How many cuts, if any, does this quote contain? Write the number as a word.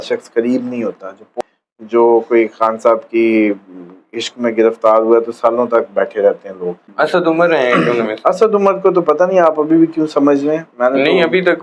two